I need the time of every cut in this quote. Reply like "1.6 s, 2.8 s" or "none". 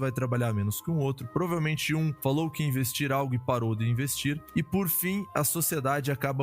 4.4 s